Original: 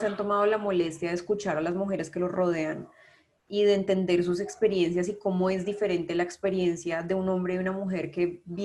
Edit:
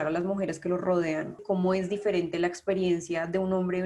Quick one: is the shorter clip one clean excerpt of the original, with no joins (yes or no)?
no